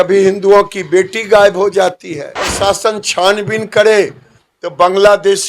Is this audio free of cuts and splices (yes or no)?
no